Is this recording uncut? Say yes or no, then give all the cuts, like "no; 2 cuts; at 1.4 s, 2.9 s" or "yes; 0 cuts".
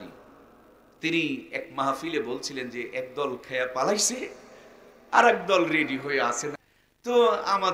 no; 1 cut; at 6.7 s